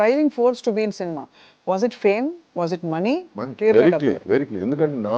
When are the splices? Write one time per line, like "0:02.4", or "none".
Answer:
0:03.3